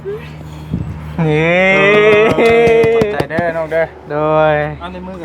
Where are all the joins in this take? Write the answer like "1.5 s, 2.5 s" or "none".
none